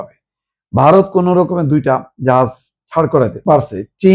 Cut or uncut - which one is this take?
uncut